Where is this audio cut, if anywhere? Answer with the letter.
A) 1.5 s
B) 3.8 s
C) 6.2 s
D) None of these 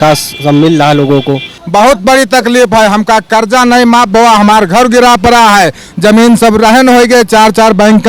A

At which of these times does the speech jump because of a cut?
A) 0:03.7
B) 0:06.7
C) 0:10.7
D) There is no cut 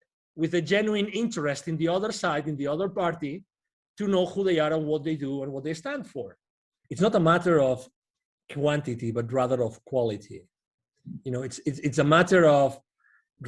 B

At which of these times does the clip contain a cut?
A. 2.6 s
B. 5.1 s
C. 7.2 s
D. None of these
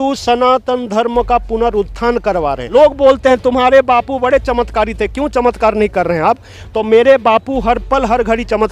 A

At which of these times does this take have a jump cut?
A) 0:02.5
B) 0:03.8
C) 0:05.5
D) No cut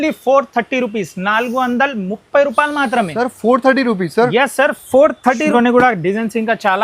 C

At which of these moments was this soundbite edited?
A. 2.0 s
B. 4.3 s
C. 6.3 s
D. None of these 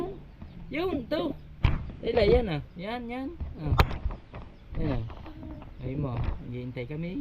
D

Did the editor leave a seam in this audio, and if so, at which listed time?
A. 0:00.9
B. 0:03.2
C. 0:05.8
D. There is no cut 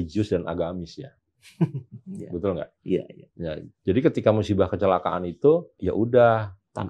C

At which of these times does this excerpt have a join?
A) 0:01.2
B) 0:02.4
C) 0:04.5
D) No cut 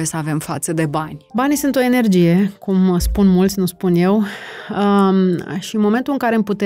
A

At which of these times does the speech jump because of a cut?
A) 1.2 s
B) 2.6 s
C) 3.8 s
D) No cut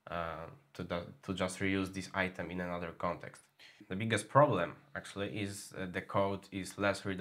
C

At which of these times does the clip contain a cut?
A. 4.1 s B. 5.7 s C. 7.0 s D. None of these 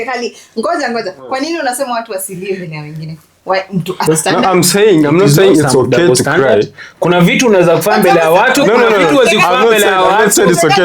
A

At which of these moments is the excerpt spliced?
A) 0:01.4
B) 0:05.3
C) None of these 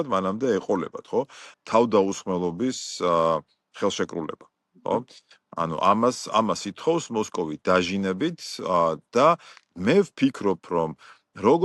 A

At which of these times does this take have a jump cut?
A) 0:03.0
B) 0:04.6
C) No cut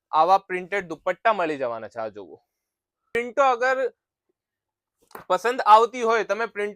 A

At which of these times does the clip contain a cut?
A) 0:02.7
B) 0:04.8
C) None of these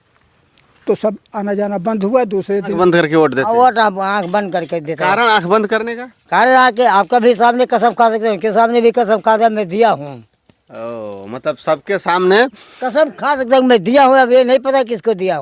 A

